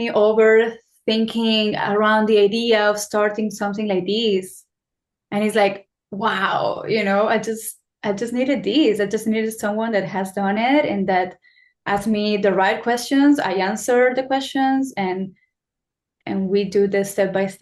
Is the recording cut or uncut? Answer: uncut